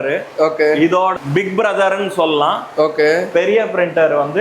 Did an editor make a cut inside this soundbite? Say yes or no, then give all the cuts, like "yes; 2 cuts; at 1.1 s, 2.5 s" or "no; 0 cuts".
yes; 1 cut; at 1.1 s